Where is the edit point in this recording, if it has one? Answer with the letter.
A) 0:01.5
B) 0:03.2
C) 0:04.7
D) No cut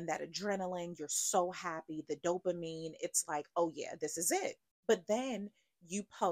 C